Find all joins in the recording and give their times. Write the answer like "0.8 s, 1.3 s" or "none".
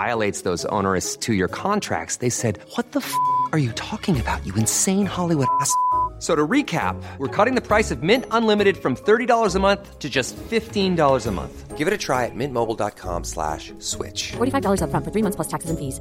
none